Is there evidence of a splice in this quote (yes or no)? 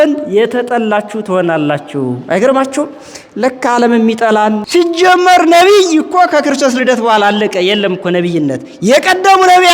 yes